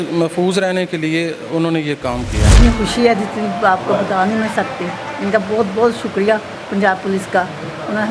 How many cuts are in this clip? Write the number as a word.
one